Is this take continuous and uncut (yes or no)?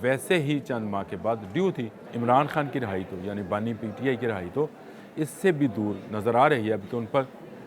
no